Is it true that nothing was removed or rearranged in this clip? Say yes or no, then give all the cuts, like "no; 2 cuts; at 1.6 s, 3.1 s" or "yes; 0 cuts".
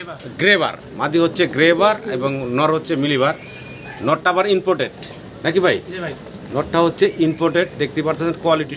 yes; 0 cuts